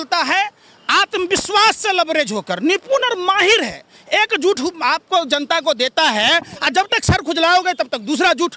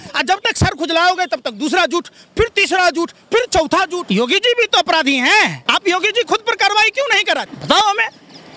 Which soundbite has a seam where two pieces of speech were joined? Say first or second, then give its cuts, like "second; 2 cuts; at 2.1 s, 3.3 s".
second; 3 cuts; at 4.0 s, 5.6 s, 7.5 s